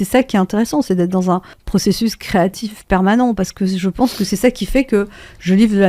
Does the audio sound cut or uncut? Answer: cut